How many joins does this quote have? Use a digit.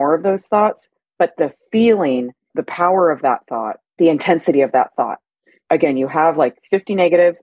3